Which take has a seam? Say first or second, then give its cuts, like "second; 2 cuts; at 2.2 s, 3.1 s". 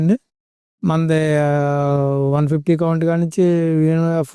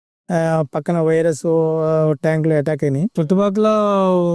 second; 1 cut; at 3.1 s